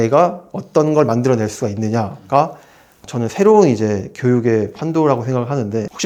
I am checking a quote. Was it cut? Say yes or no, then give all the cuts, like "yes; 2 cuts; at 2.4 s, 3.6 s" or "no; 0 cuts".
no; 0 cuts